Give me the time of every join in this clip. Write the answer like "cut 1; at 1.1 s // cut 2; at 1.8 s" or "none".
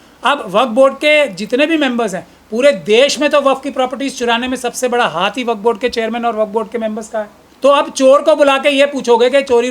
cut 1; at 7.4 s